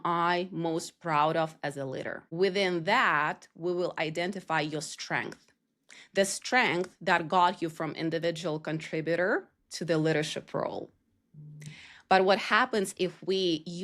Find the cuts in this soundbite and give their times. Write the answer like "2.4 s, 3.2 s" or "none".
2.2 s